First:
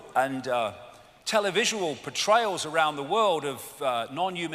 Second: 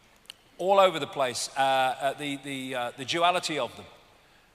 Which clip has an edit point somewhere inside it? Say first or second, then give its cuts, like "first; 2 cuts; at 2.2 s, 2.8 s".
second; 1 cut; at 2.9 s